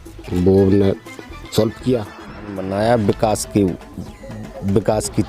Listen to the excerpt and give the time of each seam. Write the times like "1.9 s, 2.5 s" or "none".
2.6 s